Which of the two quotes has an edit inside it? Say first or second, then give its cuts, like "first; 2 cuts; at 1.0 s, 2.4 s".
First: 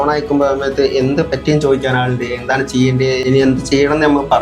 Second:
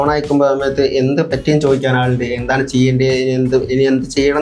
first; 1 cut; at 3.2 s